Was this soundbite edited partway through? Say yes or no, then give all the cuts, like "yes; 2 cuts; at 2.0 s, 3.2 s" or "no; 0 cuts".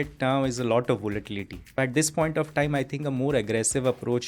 yes; 1 cut; at 1.8 s